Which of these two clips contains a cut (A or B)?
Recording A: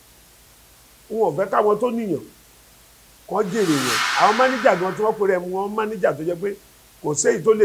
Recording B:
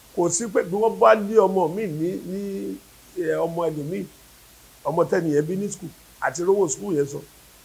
A